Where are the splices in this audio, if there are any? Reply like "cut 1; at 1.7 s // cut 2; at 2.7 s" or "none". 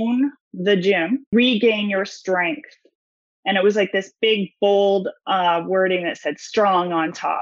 cut 1; at 1.3 s